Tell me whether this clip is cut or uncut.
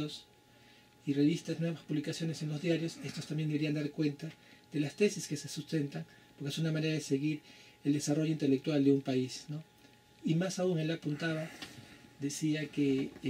uncut